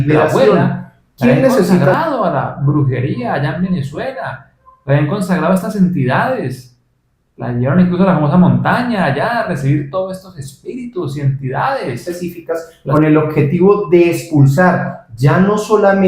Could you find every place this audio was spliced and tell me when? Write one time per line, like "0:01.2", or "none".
0:01.9
0:12.1